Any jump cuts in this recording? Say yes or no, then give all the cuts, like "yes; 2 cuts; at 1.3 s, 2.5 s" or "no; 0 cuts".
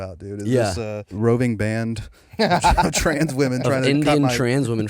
yes; 1 cut; at 1.0 s